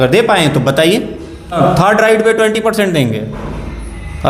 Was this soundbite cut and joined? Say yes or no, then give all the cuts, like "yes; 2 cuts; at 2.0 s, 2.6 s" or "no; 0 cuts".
yes; 1 cut; at 1.6 s